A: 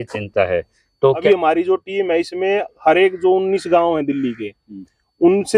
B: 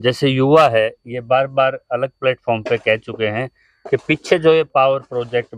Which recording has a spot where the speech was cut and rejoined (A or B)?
A